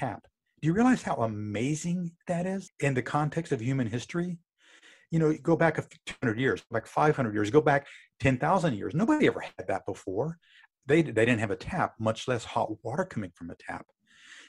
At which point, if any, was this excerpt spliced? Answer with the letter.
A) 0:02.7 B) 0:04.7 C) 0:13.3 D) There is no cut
A